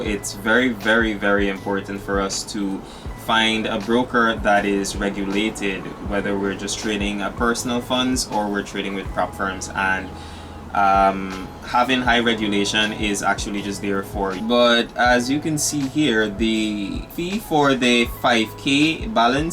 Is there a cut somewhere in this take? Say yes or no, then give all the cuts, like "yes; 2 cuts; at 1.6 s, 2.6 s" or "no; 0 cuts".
yes; 1 cut; at 14.4 s